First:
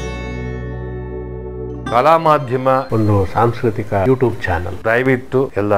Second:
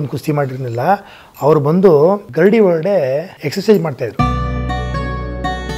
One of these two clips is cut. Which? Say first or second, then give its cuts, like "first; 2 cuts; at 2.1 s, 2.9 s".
second; 3 cuts; at 2.3 s, 3.4 s, 4.2 s